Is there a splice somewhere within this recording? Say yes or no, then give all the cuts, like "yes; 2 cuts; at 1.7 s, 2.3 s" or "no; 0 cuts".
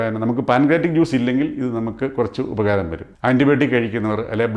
yes; 1 cut; at 3.0 s